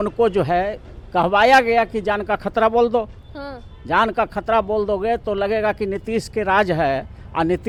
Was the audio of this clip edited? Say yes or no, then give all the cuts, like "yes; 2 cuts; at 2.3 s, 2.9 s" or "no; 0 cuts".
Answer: no; 0 cuts